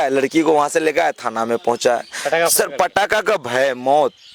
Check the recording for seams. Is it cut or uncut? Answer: uncut